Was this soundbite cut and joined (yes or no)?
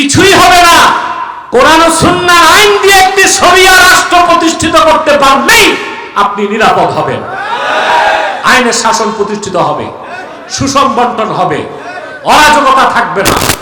no